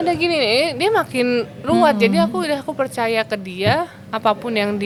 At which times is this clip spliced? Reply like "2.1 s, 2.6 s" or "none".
none